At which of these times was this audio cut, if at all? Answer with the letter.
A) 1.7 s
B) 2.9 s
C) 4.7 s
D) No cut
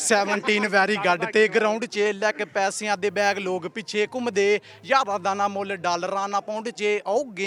D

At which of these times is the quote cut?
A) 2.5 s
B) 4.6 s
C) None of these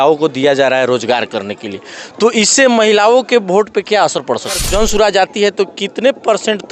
B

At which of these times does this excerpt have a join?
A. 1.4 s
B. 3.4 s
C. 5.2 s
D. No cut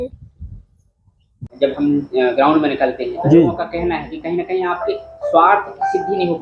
A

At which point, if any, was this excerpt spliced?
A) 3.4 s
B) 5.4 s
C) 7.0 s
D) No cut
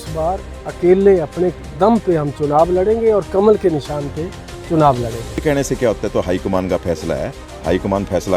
B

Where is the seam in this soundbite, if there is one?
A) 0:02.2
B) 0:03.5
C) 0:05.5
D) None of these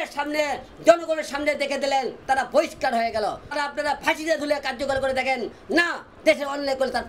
B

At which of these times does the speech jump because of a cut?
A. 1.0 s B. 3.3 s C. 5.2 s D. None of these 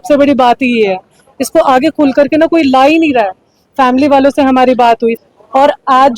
C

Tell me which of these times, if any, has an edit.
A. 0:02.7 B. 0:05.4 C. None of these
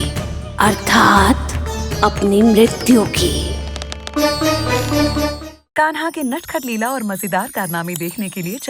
B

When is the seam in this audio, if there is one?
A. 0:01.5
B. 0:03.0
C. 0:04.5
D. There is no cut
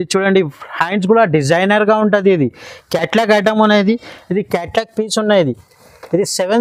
D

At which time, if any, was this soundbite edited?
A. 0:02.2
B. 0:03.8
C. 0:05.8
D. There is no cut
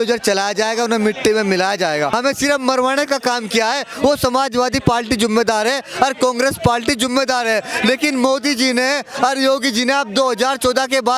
A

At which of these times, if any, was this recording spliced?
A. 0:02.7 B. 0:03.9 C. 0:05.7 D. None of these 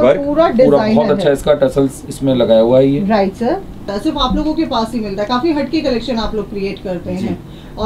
B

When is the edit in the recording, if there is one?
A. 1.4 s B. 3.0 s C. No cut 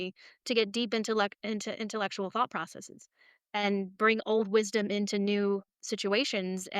C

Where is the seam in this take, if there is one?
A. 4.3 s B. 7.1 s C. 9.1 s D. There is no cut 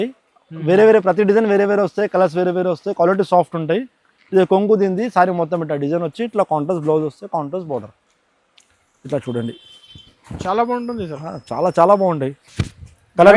D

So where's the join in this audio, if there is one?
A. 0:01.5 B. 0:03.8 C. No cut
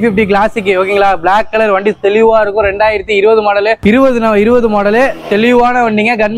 B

